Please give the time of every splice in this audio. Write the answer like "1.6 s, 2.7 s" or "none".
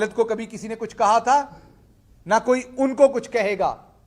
none